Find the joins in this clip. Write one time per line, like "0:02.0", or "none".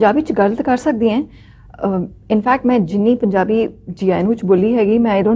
none